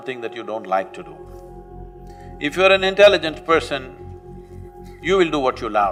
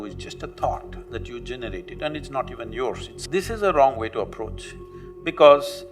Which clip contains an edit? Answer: second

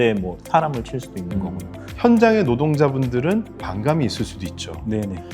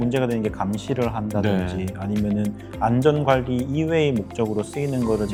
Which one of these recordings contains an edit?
first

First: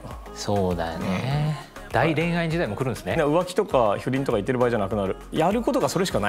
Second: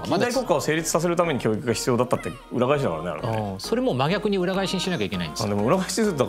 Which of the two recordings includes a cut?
first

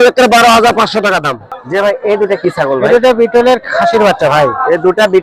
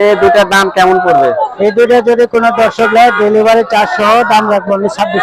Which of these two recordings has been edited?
first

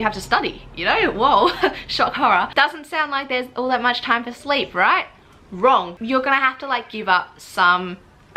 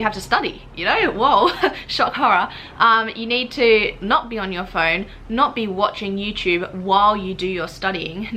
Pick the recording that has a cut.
first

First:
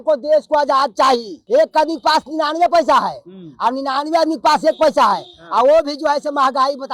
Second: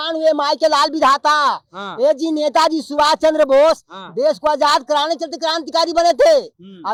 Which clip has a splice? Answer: first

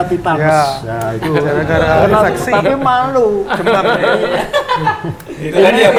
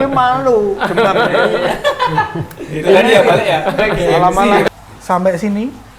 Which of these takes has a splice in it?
second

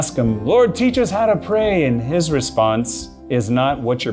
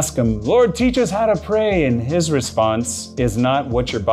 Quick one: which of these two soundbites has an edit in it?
second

